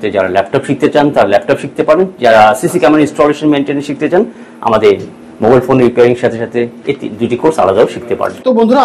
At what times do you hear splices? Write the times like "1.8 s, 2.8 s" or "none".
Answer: none